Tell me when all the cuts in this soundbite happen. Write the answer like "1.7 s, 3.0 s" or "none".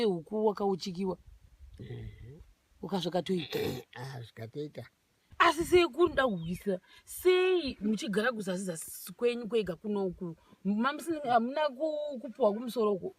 5.3 s

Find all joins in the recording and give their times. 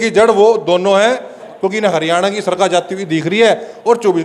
1.4 s

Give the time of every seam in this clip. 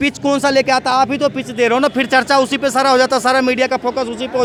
none

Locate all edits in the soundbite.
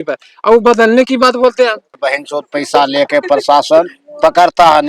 2.0 s

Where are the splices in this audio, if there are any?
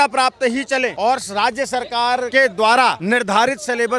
0.9 s, 2.3 s, 3.0 s

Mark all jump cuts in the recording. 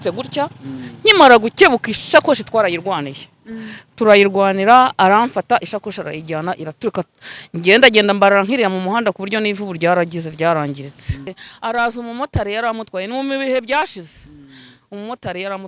11.4 s

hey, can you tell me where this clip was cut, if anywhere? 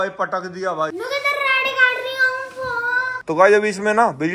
3.1 s

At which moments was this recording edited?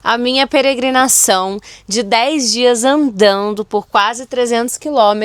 none

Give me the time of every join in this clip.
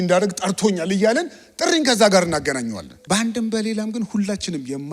2.9 s

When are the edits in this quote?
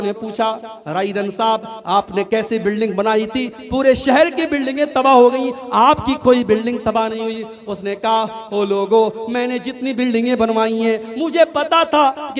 none

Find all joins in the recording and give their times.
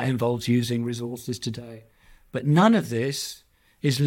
none

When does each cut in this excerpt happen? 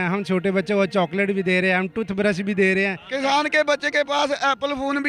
3.0 s

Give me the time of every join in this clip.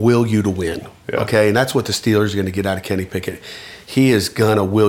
none

